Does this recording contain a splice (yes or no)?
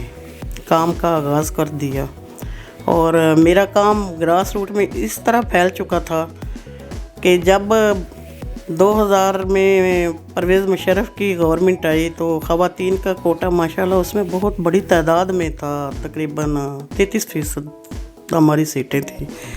no